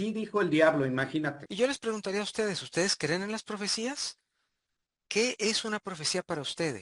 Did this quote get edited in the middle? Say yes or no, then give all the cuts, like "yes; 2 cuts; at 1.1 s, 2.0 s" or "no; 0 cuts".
yes; 1 cut; at 1.4 s